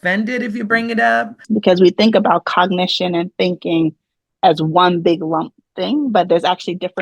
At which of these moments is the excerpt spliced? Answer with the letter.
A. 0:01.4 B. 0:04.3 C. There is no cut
A